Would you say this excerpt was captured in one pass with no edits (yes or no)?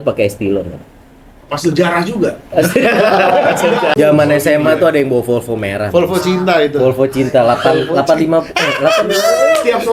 no